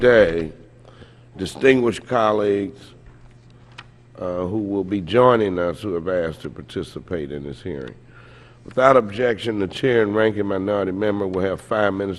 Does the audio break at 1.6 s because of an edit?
no; 1 cut; at 6.8 s

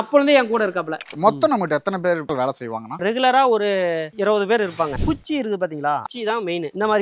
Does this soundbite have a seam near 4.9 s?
yes; 2 cuts; at 1.1 s, 4.9 s

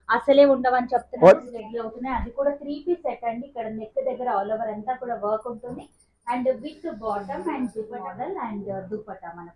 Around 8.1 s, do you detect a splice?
yes; 2 cuts; at 1.5 s, 8.1 s

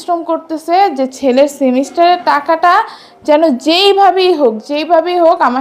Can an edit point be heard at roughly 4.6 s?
no; 0 cuts

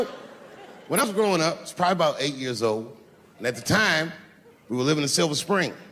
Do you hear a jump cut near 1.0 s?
yes; 1 cut; at 1.0 s

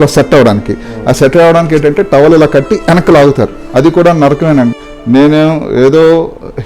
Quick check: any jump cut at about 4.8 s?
yes; 1 cut; at 4.8 s

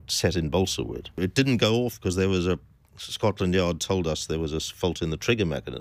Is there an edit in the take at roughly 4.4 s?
no; 1 cut; at 1.1 s

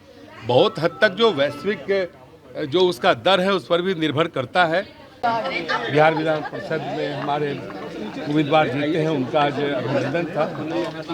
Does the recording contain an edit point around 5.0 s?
yes; 1 cut; at 5.0 s

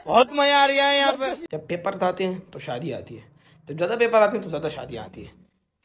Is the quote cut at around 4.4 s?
no; 1 cut; at 1.4 s

